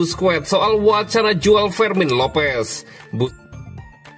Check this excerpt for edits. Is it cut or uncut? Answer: cut